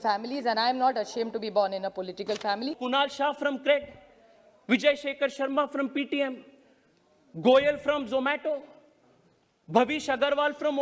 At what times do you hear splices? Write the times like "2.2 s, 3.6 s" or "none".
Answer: 2.8 s